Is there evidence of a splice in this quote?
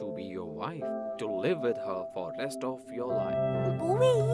yes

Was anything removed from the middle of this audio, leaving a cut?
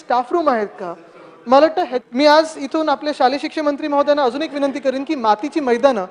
yes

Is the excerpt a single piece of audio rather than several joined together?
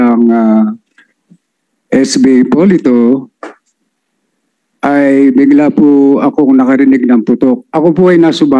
no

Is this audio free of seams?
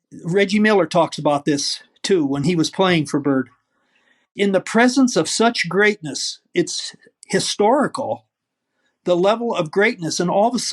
no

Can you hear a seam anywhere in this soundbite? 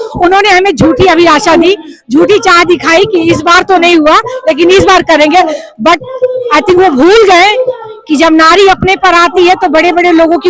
no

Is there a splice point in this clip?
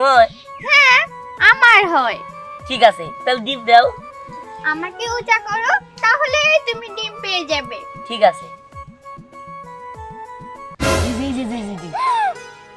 no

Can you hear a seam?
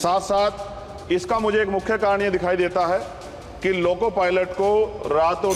no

